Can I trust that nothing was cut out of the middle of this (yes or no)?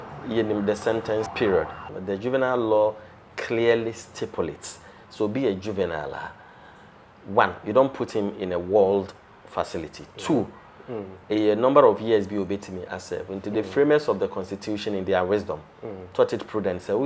no